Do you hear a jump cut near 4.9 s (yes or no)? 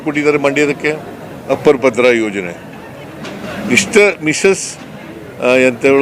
no